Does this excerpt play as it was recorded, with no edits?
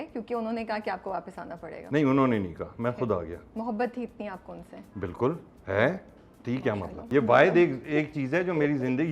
no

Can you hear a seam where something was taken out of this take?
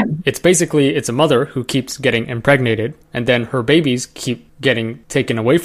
no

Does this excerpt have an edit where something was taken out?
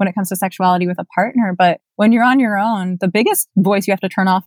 yes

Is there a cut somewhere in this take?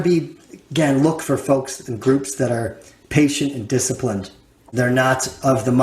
yes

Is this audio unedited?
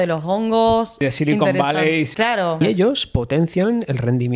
no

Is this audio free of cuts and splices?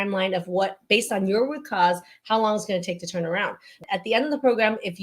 no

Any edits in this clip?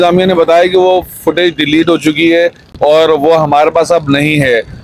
no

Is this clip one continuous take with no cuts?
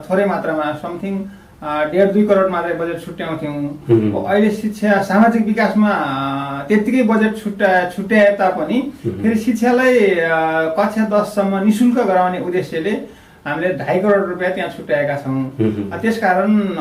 yes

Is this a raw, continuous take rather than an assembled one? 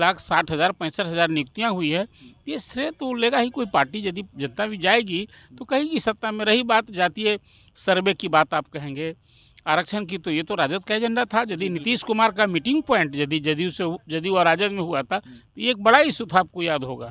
yes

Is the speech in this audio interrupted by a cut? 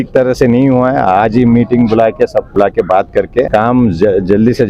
yes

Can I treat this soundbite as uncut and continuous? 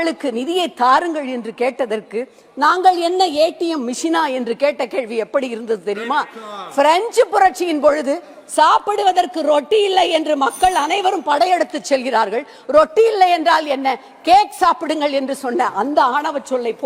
yes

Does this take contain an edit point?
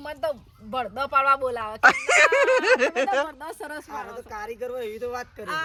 no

